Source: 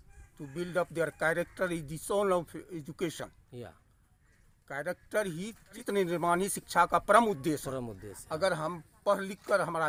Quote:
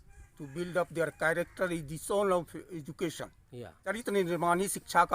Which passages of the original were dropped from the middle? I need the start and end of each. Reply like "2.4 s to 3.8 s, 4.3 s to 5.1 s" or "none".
3.9 s to 5.7 s